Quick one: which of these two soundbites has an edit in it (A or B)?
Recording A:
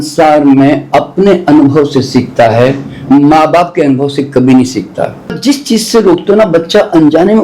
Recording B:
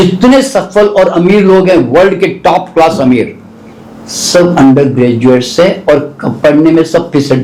A